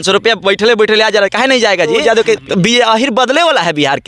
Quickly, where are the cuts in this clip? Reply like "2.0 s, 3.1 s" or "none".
2.0 s